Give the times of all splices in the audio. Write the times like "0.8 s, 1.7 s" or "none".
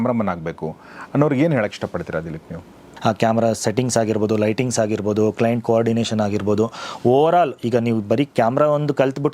2.9 s